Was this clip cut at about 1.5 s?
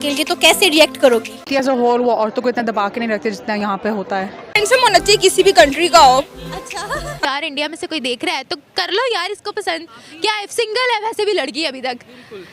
yes; 3 cuts; at 1.5 s, 4.4 s, 7.2 s

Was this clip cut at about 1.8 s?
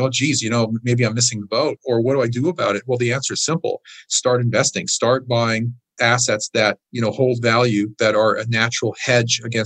yes; 1 cut; at 1.8 s

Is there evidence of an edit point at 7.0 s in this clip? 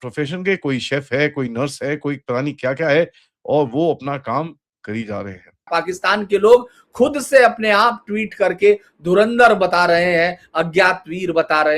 no; 1 cut; at 5.7 s

